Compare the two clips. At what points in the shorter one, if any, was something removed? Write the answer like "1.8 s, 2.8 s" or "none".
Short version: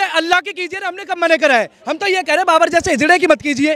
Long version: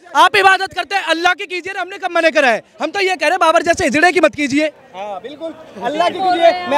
none